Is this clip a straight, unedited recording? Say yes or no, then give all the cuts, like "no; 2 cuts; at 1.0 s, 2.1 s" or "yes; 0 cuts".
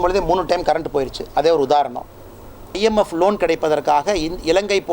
no; 1 cut; at 2.8 s